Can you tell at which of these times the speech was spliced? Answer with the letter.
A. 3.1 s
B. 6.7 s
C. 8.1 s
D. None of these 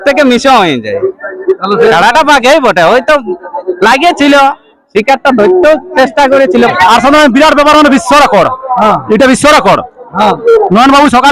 B